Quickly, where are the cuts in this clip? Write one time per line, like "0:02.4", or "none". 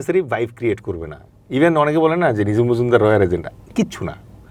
none